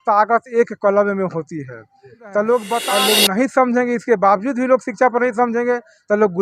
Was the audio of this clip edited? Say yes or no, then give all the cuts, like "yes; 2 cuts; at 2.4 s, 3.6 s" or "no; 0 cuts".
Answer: yes; 1 cut; at 2.9 s